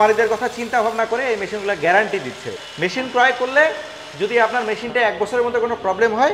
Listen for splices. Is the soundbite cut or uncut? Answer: cut